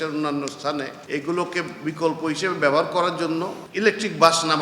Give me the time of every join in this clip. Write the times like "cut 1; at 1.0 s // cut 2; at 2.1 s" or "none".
cut 1; at 1.0 s // cut 2; at 3.6 s